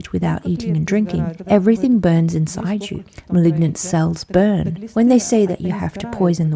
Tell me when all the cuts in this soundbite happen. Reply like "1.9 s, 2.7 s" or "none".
none